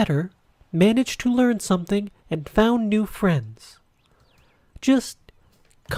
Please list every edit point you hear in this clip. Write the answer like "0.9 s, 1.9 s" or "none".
none